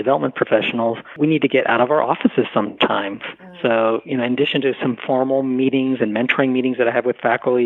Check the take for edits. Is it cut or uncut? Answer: cut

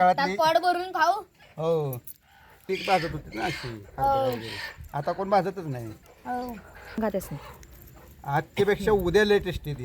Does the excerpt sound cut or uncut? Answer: cut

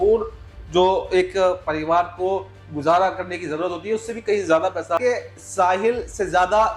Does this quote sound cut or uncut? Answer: cut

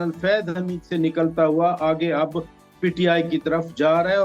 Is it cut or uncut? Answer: uncut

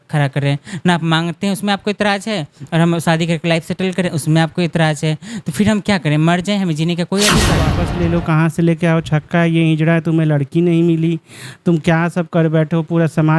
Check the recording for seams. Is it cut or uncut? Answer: cut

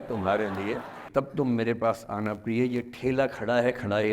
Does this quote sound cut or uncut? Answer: cut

